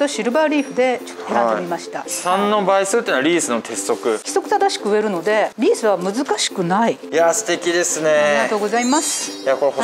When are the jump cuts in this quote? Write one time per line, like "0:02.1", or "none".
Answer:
0:02.0
0:04.2
0:07.0